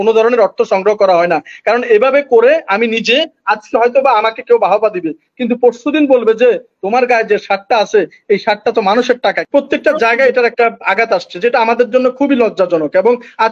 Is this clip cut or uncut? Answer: cut